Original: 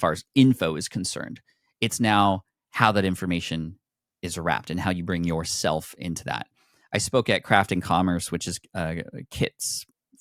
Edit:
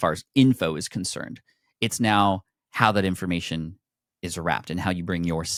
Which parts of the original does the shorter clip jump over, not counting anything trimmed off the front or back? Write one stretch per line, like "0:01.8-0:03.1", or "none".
none